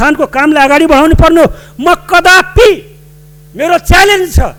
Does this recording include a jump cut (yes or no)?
no